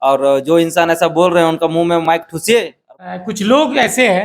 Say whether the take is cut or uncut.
cut